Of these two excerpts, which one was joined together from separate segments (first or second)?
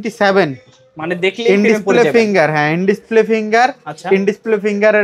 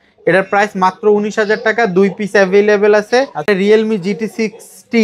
second